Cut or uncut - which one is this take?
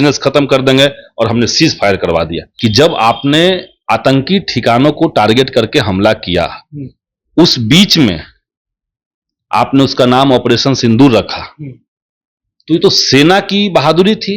cut